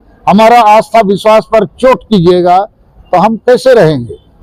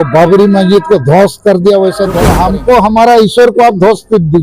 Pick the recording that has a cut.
second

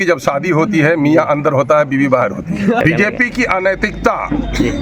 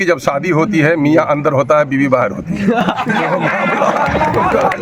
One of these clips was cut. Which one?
first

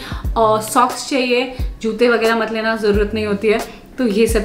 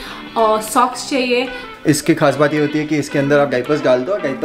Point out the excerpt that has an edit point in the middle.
second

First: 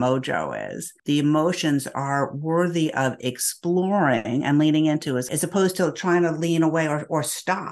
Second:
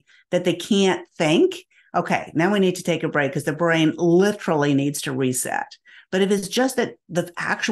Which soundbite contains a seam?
first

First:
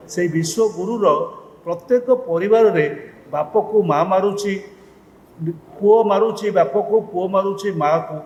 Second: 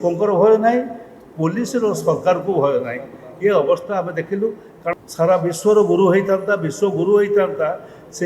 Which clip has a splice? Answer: second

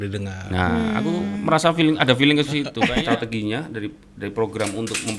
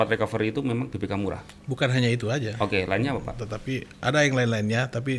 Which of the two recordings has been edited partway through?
first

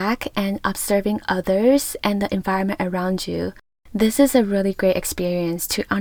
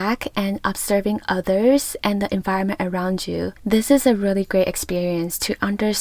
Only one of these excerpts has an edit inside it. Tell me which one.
second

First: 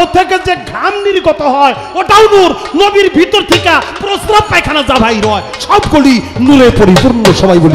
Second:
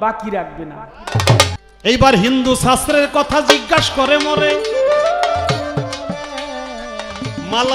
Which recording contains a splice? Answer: second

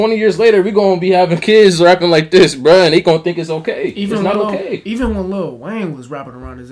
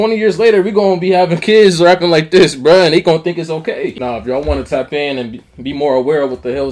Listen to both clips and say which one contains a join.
second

